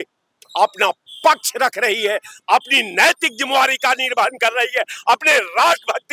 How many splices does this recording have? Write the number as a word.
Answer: zero